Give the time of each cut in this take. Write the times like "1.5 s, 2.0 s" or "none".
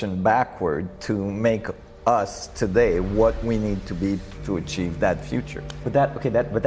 5.8 s